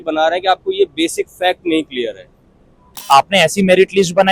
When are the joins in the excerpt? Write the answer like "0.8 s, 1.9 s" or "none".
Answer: 2.9 s

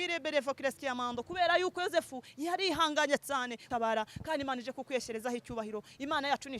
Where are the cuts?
3.6 s

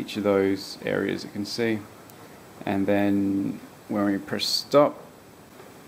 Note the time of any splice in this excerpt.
none

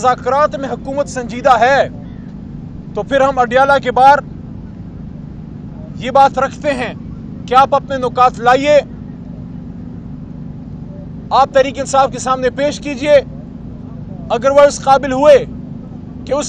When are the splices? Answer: none

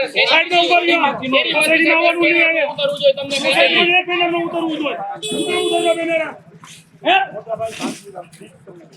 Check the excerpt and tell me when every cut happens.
none

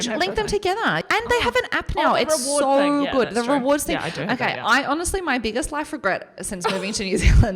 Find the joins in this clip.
1.0 s

